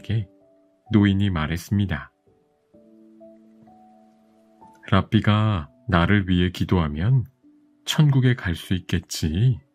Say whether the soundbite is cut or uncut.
uncut